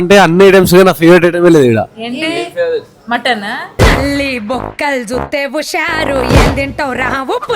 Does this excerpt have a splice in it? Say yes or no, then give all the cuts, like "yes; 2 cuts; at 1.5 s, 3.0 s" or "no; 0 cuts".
no; 0 cuts